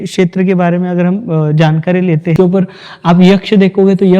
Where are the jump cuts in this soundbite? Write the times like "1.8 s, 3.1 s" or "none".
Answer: 2.3 s